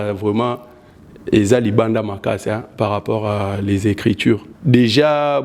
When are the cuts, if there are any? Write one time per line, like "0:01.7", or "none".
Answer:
0:04.5